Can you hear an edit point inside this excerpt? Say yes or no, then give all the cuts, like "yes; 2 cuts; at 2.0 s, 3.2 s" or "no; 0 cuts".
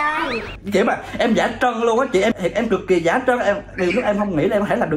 no; 0 cuts